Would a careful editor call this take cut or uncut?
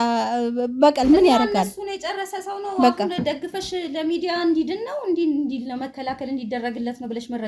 uncut